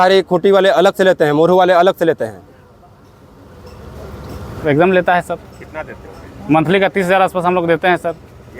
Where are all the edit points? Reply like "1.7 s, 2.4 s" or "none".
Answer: 4.5 s